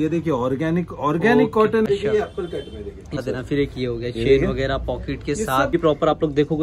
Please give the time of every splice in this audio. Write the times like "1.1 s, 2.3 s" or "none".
1.9 s, 3.2 s, 5.7 s